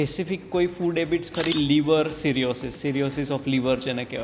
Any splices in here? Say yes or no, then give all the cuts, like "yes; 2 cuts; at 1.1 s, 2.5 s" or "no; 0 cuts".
yes; 1 cut; at 1.5 s